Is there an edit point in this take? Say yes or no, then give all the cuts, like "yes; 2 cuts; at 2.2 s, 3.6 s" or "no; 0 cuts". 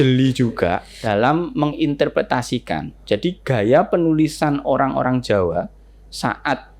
yes; 1 cut; at 1.0 s